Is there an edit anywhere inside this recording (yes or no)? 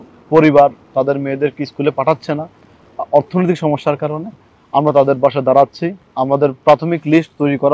no